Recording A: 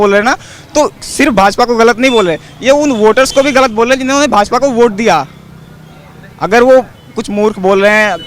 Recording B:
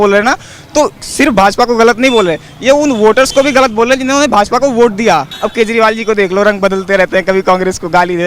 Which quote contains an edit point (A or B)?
B